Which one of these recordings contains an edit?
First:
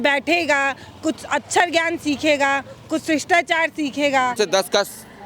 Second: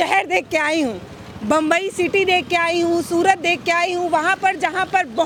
first; 1 cut; at 4.3 s

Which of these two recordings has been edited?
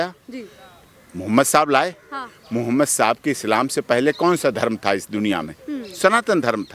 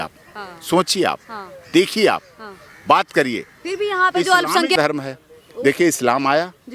second; 1 cut; at 4.8 s

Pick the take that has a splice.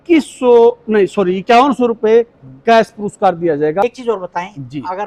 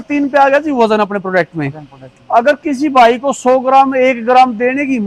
first; 1 cut; at 3.8 s

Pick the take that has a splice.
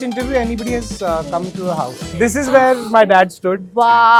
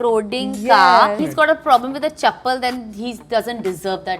second; 1 cut; at 1.2 s

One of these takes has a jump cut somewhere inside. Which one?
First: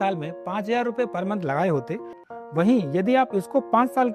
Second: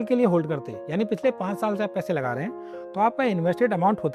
first; 1 cut; at 2.2 s

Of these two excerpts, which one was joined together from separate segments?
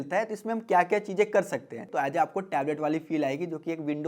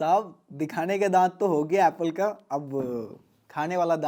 first; 1 cut; at 1.8 s

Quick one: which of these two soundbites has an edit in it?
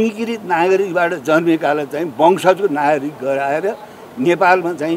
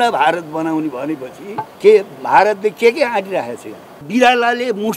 second; 2 cuts; at 1.7 s, 4.0 s

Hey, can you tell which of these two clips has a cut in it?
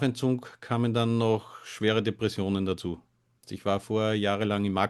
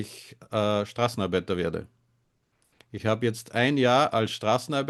first; 1 cut; at 3.5 s

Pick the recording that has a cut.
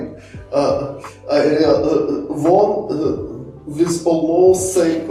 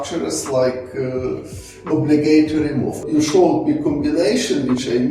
second; 1 cut; at 3.0 s

